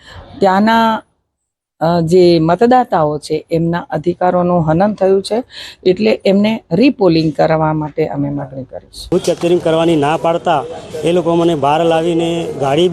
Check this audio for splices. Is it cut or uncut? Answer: cut